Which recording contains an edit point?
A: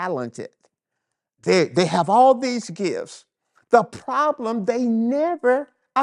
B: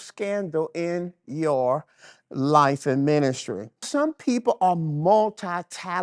B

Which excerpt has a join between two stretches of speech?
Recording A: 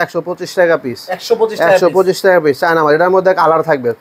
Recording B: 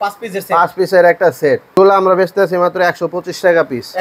B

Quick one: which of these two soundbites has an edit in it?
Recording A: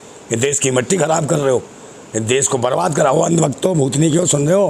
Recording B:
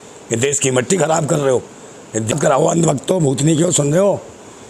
B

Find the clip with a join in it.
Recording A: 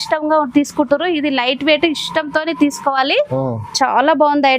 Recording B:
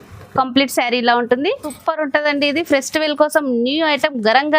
B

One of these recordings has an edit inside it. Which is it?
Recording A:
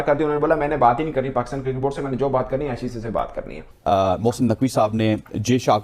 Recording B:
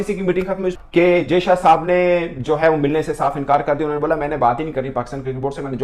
A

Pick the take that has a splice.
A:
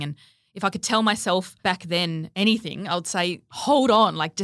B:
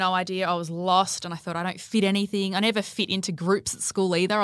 A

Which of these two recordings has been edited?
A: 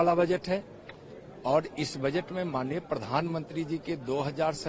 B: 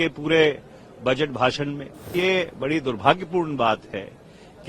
B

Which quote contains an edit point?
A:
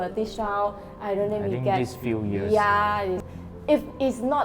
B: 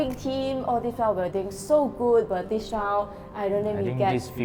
A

